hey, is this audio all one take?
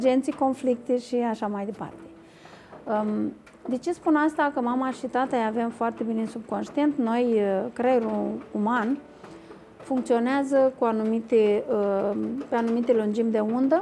yes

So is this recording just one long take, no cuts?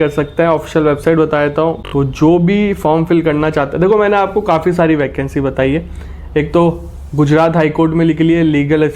no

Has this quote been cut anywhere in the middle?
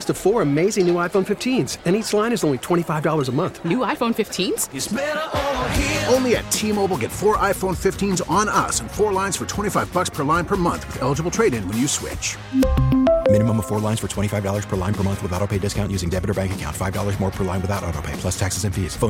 no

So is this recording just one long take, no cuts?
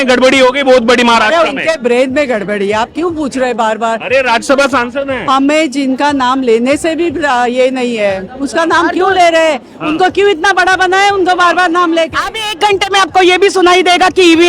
yes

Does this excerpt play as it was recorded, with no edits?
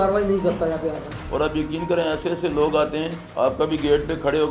no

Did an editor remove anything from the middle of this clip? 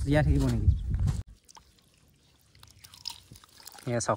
yes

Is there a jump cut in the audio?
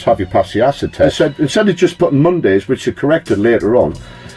yes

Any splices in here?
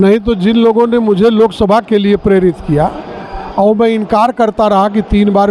no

